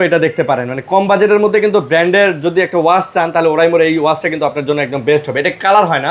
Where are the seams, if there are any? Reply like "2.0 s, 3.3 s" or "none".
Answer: none